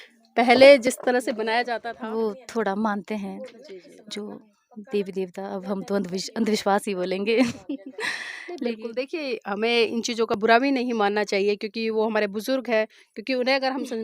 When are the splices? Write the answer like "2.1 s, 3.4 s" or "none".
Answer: 1.7 s